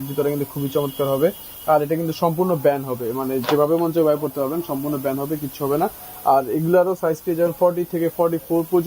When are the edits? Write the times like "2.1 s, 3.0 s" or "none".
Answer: none